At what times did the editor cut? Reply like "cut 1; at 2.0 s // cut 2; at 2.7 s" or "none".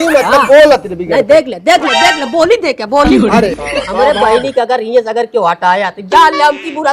cut 1; at 3.6 s